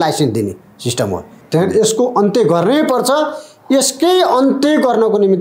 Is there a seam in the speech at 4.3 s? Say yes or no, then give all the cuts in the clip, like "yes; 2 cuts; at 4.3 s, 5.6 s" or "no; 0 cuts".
no; 1 cut; at 1.3 s